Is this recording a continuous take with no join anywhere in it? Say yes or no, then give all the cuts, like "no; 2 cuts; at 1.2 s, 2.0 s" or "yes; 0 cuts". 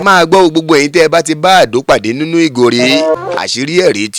no; 1 cut; at 3.2 s